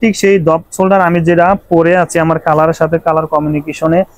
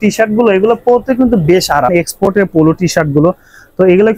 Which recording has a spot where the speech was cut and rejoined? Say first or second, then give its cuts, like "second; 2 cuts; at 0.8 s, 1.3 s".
second; 1 cut; at 1.9 s